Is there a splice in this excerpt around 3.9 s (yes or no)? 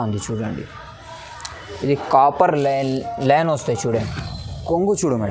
yes